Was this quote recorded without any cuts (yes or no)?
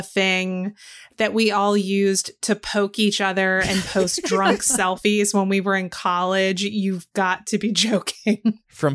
yes